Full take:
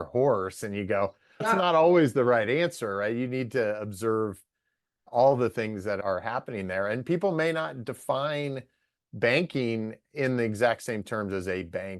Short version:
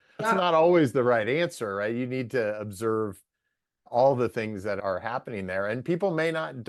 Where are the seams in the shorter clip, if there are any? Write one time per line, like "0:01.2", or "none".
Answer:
none

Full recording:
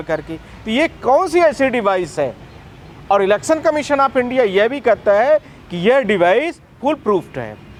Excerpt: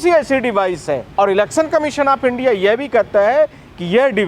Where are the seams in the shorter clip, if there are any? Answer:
0:01.1

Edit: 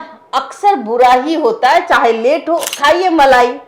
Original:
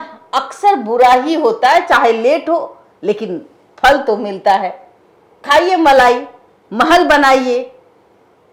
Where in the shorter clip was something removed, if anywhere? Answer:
0:02.7

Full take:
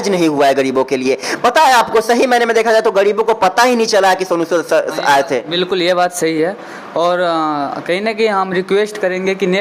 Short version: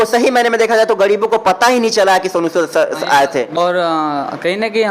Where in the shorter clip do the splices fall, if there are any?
0:03.5

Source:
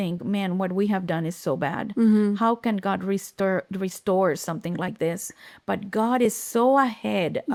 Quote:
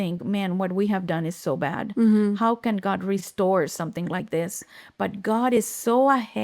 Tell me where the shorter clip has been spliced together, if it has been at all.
0:03.3

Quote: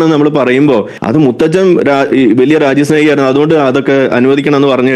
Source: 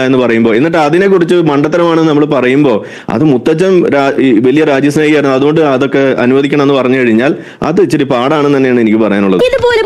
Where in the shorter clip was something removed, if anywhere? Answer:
0:00.9

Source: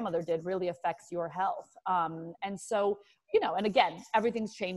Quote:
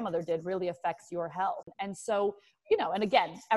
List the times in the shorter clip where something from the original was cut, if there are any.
0:01.7

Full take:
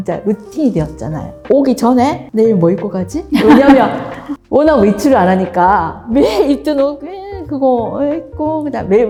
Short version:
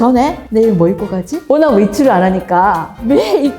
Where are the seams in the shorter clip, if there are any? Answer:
0:01.3

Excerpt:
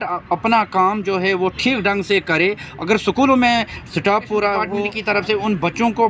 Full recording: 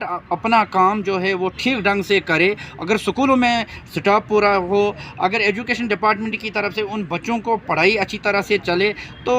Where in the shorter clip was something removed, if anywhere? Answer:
0:04.9

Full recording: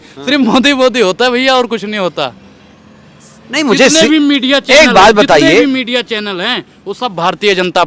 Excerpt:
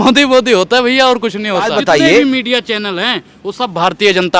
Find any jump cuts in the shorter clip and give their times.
0:01.8

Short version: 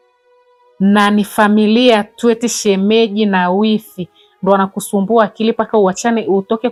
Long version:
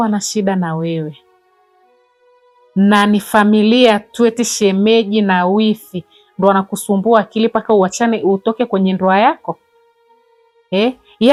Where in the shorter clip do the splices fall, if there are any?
none

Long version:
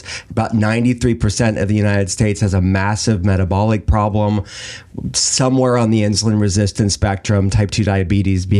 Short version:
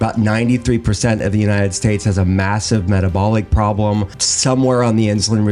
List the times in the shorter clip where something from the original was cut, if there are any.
0:04.2

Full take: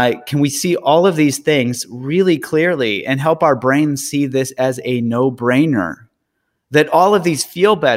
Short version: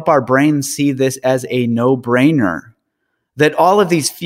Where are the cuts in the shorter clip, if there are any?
none

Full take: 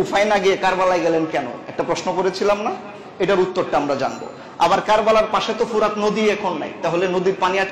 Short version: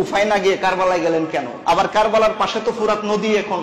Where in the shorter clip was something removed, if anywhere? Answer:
0:01.5

